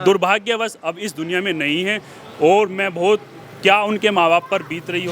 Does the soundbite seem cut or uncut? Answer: uncut